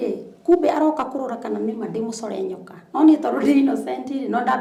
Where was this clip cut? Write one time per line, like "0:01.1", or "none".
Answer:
none